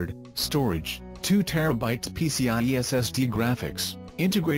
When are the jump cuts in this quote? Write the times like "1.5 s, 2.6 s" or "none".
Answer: 3.1 s